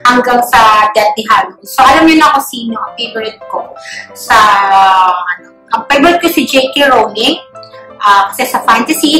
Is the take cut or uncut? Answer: uncut